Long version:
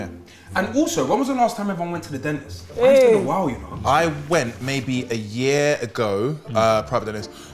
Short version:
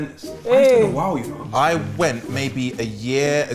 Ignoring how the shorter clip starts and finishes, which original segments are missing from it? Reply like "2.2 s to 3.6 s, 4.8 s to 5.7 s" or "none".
none

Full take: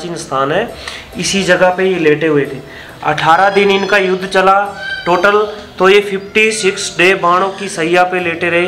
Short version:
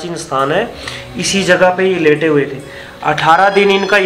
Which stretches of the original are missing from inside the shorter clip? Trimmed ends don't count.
none

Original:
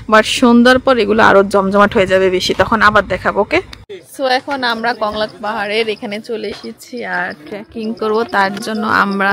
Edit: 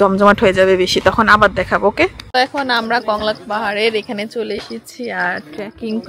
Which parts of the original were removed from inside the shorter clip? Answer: 3.9 s to 4.3 s

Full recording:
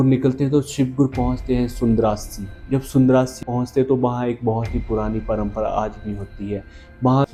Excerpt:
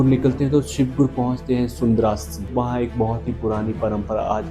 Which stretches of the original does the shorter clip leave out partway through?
2.5 s to 4.0 s

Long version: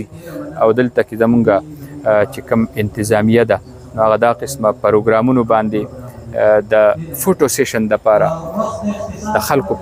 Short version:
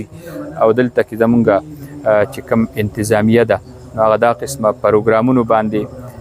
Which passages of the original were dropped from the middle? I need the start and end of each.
none

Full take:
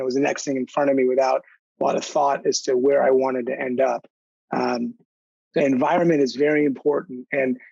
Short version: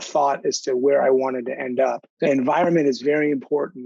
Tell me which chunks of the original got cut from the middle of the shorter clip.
4.1 s to 5.4 s

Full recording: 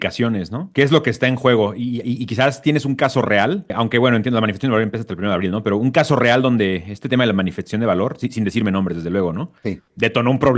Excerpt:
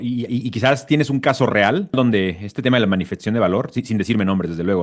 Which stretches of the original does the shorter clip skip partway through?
3.7 s to 6.4 s

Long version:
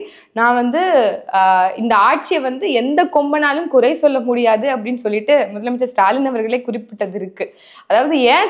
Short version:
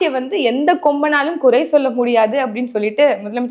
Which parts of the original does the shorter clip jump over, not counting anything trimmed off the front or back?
none

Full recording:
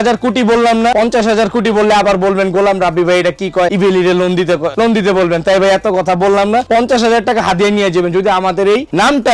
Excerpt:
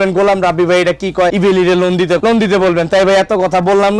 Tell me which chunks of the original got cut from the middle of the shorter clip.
4.6 s to 4.7 s

